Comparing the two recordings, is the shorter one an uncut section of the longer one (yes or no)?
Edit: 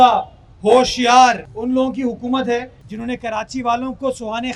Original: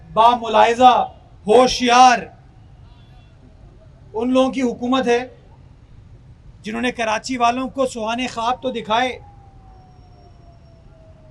no